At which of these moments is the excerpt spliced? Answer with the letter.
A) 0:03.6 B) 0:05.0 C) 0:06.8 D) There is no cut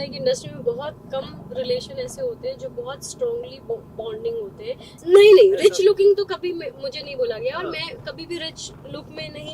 B